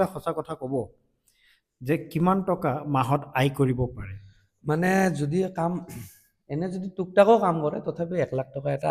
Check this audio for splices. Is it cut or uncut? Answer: uncut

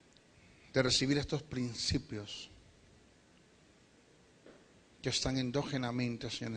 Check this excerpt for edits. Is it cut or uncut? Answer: cut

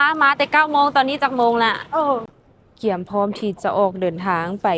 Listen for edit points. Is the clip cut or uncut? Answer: cut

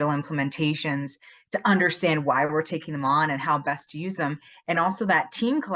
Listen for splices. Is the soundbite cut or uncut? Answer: uncut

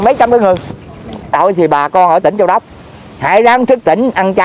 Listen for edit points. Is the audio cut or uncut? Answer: cut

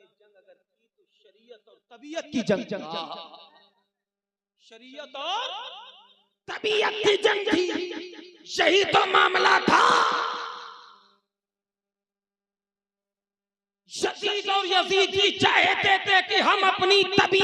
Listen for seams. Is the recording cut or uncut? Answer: uncut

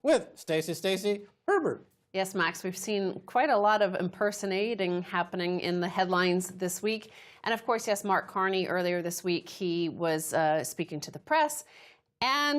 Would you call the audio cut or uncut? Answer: cut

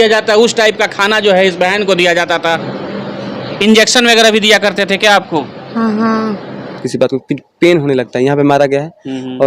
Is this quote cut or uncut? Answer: cut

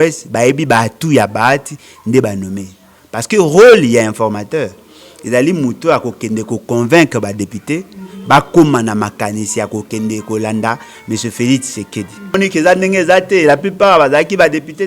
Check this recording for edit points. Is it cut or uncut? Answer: cut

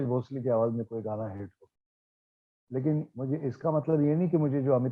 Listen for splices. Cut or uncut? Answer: uncut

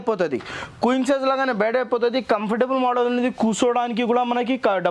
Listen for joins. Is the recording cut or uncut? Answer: uncut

